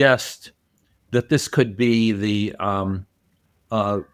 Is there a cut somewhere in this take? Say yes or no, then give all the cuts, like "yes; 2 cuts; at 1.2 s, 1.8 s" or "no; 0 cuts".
no; 0 cuts